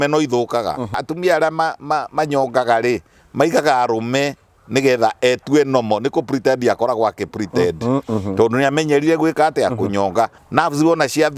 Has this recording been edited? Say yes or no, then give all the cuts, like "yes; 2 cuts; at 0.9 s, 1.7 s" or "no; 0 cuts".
yes; 2 cuts; at 1.0 s, 10.4 s